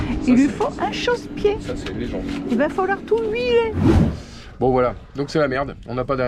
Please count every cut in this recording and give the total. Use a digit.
1